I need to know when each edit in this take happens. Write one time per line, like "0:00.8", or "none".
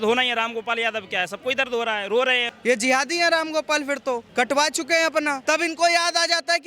0:02.4
0:04.3
0:05.4